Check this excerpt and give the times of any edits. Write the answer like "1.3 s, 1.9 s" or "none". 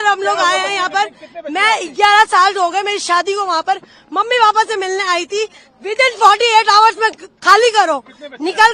none